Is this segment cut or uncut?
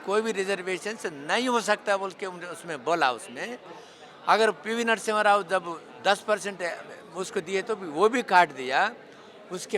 uncut